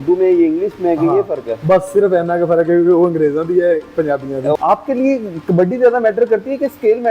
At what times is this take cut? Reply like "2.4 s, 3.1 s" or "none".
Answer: 4.5 s